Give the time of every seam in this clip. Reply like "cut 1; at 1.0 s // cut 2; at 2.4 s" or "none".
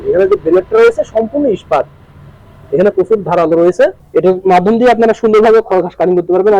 cut 1; at 4.0 s